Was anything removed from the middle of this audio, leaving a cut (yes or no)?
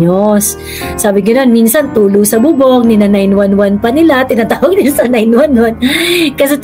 no